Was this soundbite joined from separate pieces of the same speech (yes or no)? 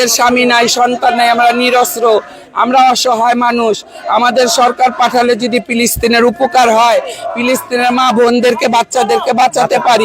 no